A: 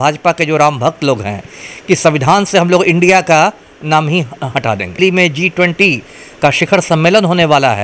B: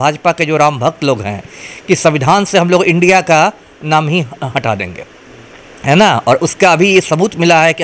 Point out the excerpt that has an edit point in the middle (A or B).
A